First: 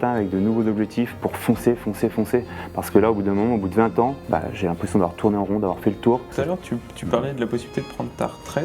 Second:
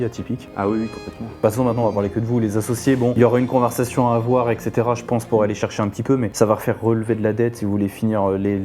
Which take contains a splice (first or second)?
first